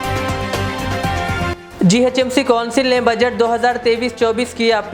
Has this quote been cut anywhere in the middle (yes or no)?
yes